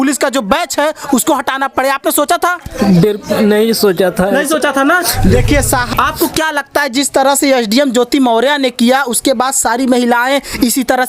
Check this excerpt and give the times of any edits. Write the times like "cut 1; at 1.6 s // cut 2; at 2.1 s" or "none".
cut 1; at 5.9 s